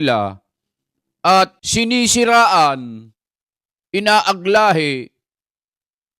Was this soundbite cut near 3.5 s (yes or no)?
no